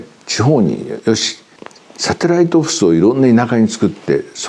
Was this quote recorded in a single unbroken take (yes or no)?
yes